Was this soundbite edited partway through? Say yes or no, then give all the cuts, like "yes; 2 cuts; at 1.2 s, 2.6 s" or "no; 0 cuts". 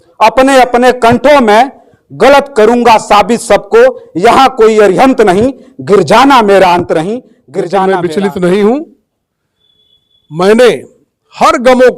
yes; 1 cut; at 7.9 s